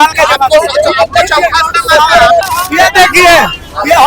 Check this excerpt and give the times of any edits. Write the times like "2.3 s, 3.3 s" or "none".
2.5 s